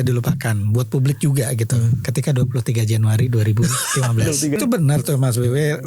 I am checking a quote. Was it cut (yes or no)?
yes